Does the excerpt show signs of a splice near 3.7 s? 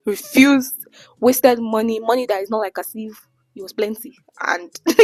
no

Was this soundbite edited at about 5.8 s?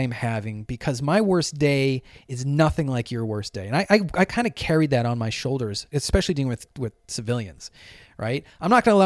yes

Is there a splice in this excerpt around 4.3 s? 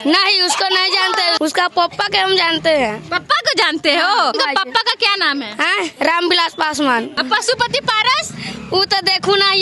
yes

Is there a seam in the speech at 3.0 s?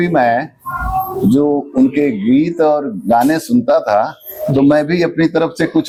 no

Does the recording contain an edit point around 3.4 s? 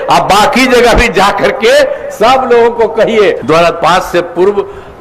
yes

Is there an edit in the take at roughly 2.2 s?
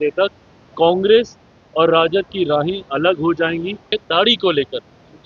no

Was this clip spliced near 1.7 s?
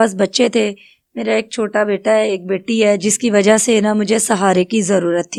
no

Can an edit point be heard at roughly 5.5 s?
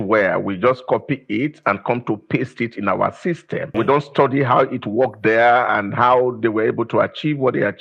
no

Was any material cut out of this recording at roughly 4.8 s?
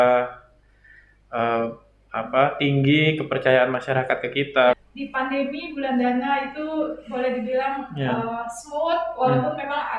yes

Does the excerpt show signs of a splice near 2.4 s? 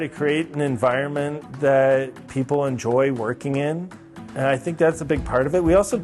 no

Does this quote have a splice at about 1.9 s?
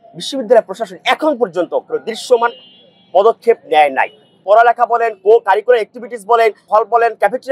no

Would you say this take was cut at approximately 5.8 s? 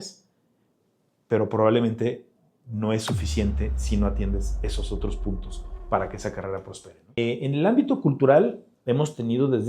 no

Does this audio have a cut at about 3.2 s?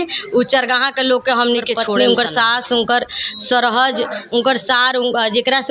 no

